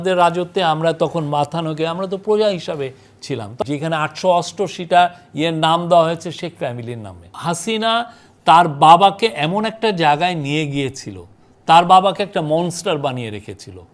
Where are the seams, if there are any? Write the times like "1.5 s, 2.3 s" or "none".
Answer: 3.5 s, 7.2 s